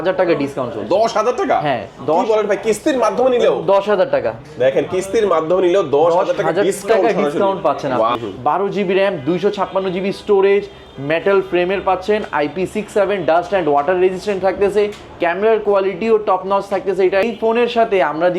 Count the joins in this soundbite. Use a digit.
2